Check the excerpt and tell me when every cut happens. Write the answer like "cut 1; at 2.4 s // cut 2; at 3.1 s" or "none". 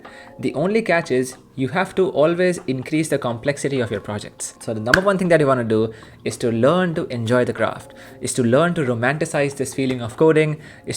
cut 1; at 4.5 s

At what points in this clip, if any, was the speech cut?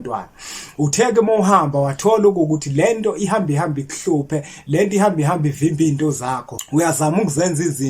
cut 1; at 6.5 s

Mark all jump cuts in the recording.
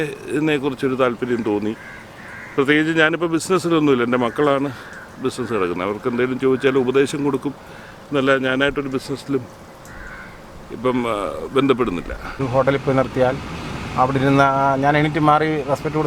cut 1; at 12.4 s

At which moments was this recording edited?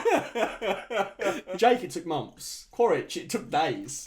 cut 1; at 1.5 s

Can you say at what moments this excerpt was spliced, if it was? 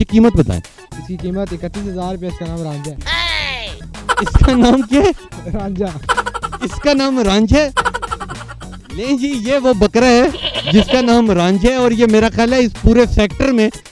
none

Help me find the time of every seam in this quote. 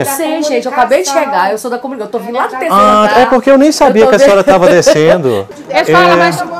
cut 1; at 5.5 s

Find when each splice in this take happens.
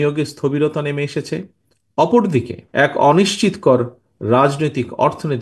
cut 1; at 2.6 s

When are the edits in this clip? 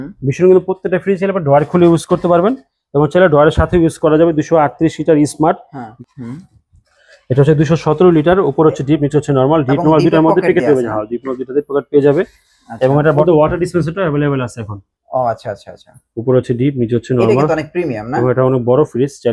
cut 1; at 5.9 s // cut 2; at 13.2 s

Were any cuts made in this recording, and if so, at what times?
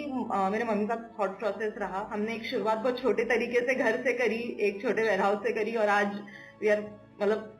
cut 1; at 2.1 s

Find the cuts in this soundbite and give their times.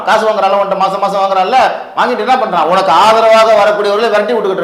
none

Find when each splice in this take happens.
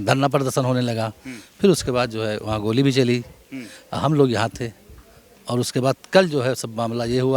none

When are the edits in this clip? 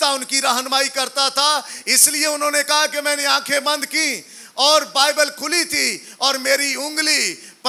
none

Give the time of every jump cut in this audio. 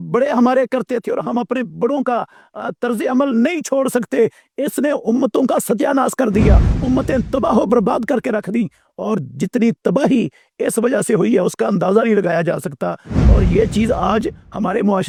none

